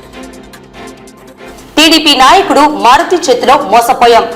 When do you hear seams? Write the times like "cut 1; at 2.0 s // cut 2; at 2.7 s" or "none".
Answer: none